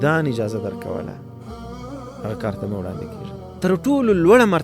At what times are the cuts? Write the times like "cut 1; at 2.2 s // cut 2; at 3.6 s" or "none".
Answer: cut 1; at 3.4 s